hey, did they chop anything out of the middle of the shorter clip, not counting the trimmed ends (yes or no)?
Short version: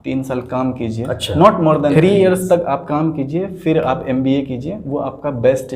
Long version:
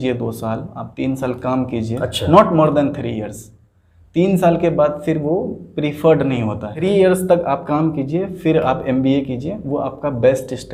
yes